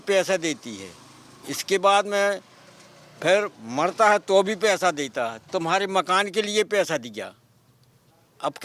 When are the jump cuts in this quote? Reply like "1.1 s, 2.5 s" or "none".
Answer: none